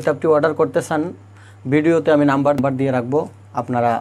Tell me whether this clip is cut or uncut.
cut